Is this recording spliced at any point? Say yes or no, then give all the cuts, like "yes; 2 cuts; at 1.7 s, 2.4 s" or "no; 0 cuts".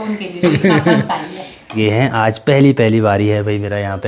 yes; 1 cut; at 1.7 s